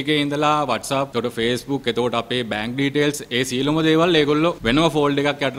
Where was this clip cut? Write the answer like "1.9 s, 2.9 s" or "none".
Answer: 1.1 s